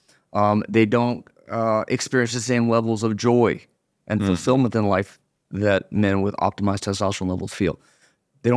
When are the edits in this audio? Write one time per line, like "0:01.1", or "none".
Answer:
none